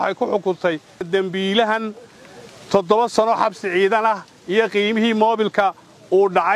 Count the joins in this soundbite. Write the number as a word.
one